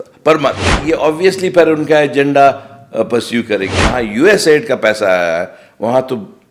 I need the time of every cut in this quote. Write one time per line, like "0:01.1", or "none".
0:00.8
0:03.8